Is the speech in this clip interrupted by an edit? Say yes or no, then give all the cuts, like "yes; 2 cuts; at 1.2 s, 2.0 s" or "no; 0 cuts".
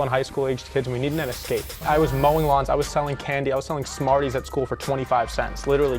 yes; 1 cut; at 1.7 s